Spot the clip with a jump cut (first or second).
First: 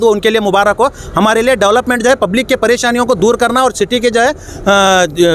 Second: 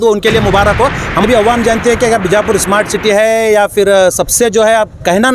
second